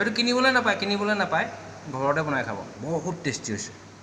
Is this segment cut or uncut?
cut